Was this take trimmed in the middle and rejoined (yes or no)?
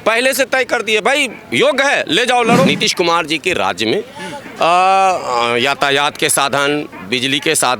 yes